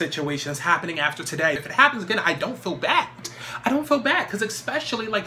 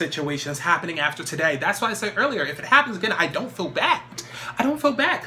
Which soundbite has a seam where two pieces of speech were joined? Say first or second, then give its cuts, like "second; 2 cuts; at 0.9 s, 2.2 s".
first; 1 cut; at 1.6 s